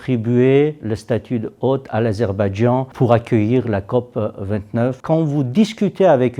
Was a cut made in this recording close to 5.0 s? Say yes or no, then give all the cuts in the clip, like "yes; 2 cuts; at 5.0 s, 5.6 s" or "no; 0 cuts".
yes; 1 cut; at 5.0 s